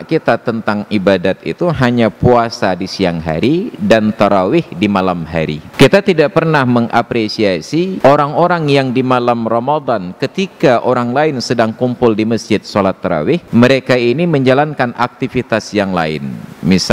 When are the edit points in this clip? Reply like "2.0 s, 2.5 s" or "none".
5.6 s, 7.9 s, 13.4 s